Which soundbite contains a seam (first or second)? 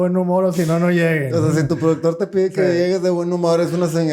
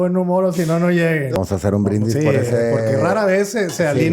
second